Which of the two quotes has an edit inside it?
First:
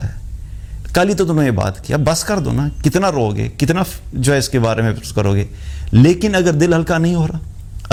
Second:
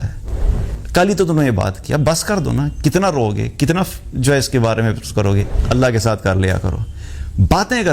second; 1 cut; at 5.5 s

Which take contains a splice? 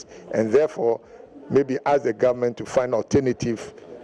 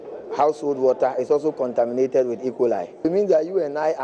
second; 1 cut; at 3.0 s

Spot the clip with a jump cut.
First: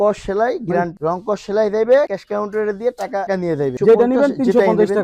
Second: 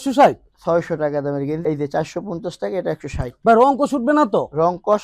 first; 2 cuts; at 0.9 s, 3.8 s

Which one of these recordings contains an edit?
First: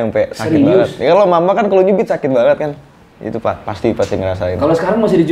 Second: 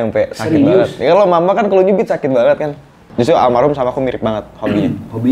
second; 1 cut; at 3.0 s

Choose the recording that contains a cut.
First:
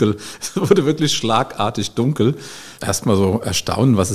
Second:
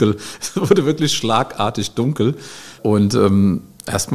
first; 1 cut; at 2.7 s

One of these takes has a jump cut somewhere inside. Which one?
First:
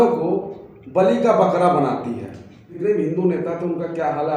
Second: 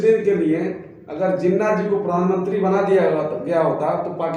first; 1 cut; at 2.8 s

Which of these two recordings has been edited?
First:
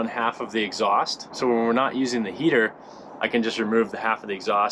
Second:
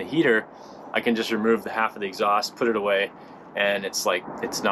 first; 1 cut; at 1.2 s

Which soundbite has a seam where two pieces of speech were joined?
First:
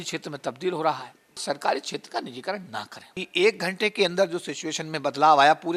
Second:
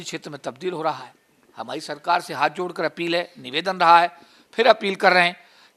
first; 2 cuts; at 1.4 s, 3.2 s

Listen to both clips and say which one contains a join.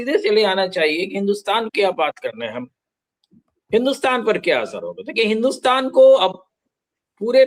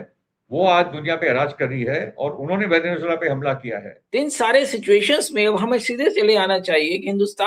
second; 1 cut; at 3.9 s

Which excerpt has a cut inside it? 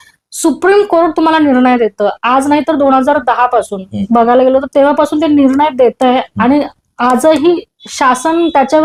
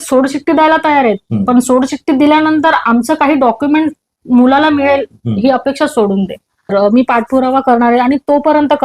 second; 1 cut; at 6.7 s

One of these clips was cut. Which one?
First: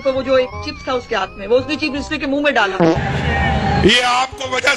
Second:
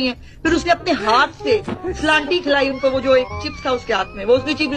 first; 1 cut; at 3.0 s

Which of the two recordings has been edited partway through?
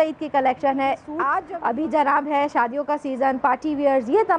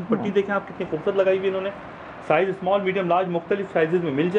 first; 1 cut; at 1.4 s

